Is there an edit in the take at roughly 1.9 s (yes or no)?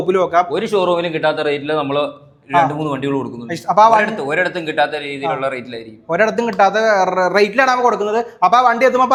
no